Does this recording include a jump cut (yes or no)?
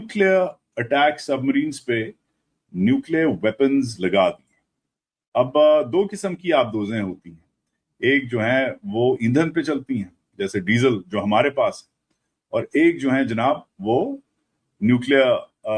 no